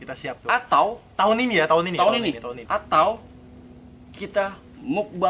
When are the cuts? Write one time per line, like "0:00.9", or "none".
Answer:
0:02.4